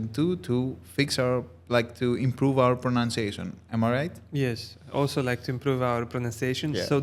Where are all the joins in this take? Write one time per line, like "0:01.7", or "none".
none